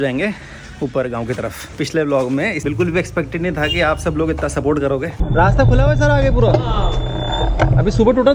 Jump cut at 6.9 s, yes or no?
no